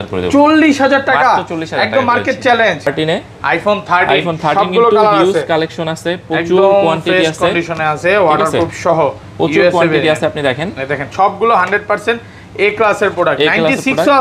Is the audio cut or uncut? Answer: cut